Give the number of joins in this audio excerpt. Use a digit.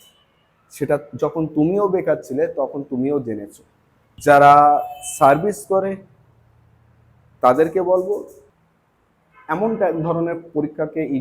2